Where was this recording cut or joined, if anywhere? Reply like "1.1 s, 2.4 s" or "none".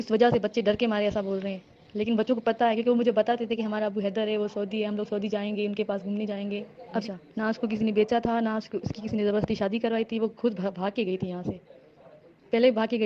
7.0 s